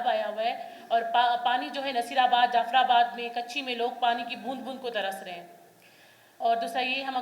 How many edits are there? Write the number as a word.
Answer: zero